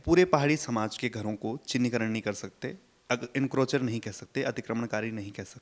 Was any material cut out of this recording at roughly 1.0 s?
yes; 1 cut; at 1.0 s

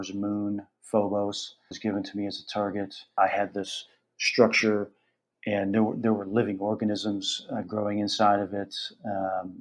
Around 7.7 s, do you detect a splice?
no; 2 cuts; at 1.7 s, 3.1 s

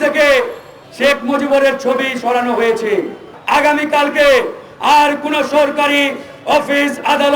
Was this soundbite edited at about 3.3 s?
yes; 1 cut; at 3.3 s

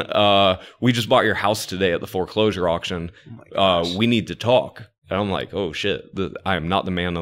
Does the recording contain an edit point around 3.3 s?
no; 1 cut; at 4.9 s

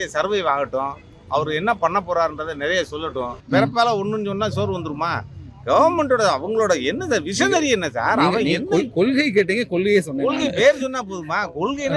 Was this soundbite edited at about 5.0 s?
no; 1 cut; at 3.4 s

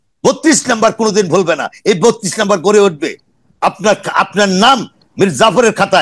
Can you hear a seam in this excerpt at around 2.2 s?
no; 0 cuts

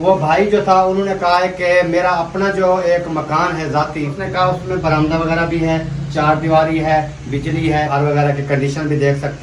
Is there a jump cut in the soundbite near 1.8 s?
no; 2 cuts; at 4.2 s, 7.9 s

